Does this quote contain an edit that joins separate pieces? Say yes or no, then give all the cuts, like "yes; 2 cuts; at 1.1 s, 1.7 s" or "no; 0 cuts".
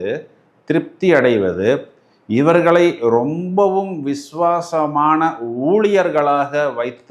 no; 0 cuts